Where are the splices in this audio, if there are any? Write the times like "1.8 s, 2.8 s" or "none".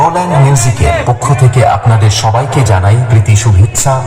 none